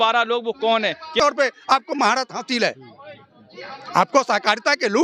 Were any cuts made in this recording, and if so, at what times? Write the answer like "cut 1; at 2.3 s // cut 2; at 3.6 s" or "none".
cut 1; at 1.2 s